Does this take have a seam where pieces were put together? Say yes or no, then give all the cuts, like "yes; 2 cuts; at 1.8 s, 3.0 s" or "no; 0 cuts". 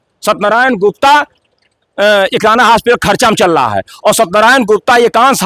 no; 0 cuts